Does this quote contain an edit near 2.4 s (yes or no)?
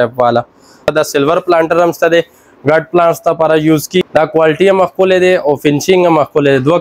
no